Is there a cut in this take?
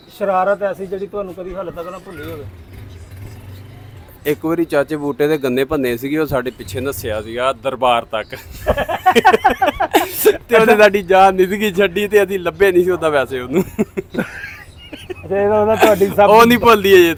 no; 0 cuts

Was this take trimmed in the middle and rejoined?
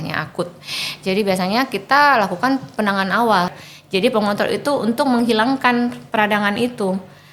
yes; 1 cut; at 3.5 s

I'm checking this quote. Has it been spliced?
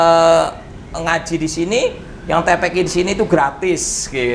no; 0 cuts

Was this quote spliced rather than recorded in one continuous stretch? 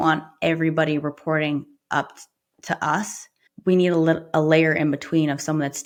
no; 0 cuts

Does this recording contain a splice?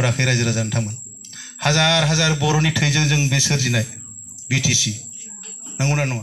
no; 0 cuts

